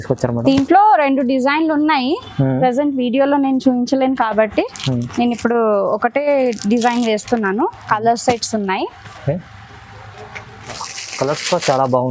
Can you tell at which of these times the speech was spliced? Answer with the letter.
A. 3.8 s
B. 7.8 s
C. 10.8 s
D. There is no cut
C